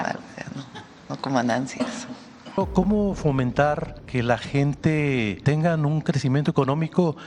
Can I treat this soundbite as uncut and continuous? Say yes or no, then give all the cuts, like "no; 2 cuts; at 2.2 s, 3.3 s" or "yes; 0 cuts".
no; 3 cuts; at 2.6 s, 3.9 s, 5.4 s